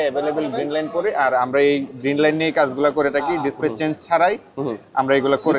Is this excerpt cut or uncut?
uncut